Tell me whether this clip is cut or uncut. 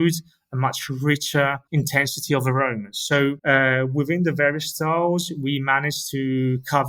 uncut